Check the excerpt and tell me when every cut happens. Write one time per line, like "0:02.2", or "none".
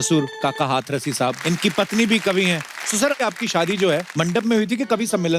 0:01.4
0:03.2
0:04.1